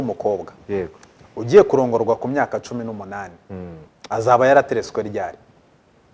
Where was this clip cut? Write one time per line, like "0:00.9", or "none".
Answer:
none

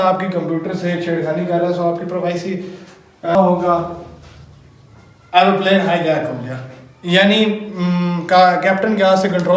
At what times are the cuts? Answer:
0:03.3

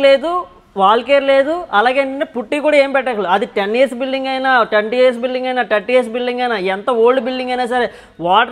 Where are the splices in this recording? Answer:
none

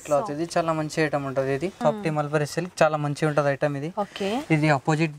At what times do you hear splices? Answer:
0:01.8

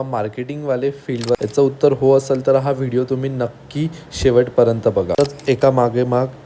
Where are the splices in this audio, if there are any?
0:01.4
0:05.2

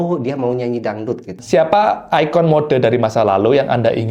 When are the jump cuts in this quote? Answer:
0:01.3

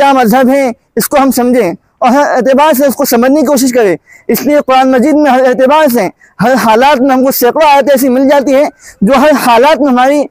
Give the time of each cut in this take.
none

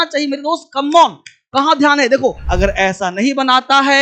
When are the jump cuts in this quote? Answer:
0:02.4

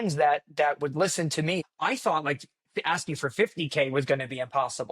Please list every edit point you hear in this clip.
0:01.7

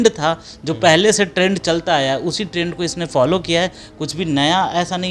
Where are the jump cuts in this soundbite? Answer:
none

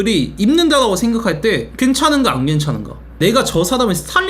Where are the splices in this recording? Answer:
0:03.2

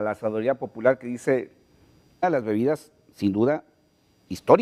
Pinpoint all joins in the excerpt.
none

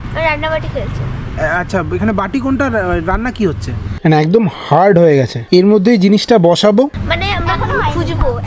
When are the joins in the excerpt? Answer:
0:03.9
0:07.0

